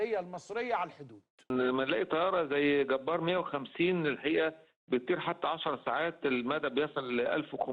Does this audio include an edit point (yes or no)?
yes